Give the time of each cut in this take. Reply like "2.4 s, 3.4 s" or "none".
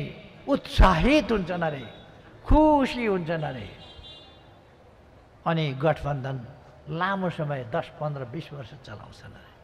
none